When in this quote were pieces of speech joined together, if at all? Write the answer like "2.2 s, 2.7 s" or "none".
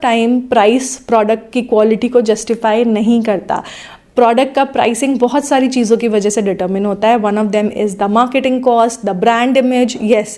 none